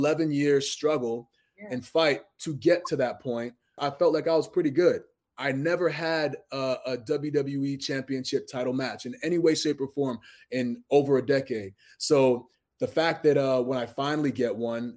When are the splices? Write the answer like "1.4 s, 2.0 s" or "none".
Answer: 3.8 s